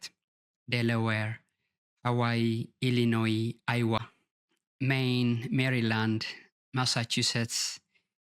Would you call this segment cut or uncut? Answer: uncut